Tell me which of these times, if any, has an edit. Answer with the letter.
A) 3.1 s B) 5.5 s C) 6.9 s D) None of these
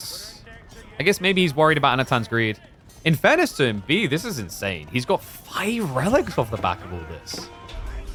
D